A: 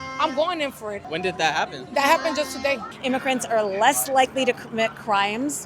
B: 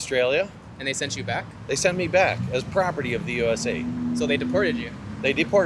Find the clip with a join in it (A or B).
A